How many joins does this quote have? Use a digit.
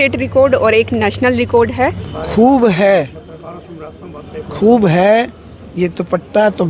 1